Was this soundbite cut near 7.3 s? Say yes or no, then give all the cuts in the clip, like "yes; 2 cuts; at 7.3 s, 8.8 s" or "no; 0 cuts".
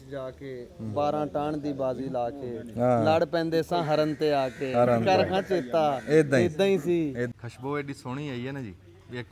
yes; 1 cut; at 7.3 s